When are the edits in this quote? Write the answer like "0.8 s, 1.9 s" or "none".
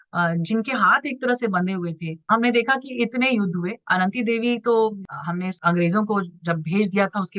2.2 s, 5.0 s